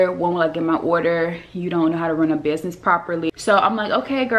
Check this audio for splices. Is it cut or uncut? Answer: cut